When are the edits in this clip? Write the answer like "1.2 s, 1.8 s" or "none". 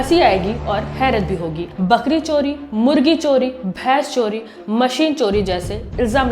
1.7 s